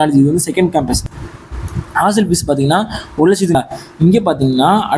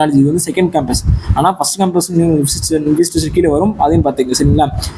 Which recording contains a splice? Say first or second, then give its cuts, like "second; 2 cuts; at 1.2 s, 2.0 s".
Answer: first; 2 cuts; at 1.2 s, 3.6 s